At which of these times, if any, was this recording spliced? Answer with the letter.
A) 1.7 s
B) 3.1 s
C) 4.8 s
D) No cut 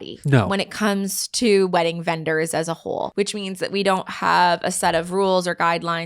B